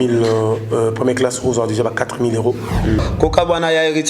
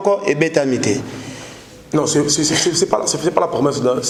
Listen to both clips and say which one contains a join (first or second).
first